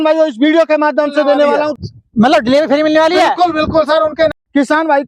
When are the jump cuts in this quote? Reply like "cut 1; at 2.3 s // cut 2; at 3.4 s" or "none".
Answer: cut 1; at 1.7 s // cut 2; at 4.3 s